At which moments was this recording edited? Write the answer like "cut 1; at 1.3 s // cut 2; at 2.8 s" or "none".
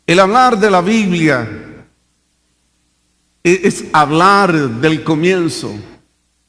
cut 1; at 1.2 s